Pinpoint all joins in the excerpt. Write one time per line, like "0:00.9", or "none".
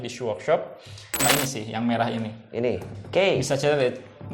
0:01.2